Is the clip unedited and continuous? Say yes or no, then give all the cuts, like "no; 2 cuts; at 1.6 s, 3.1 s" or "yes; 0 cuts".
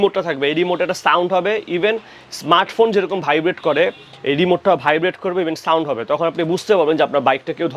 yes; 0 cuts